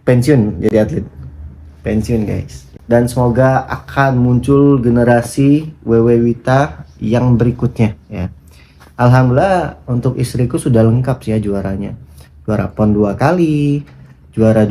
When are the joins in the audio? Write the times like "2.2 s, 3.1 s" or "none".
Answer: 2.7 s